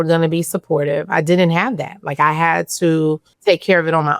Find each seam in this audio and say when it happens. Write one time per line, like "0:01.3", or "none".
0:03.3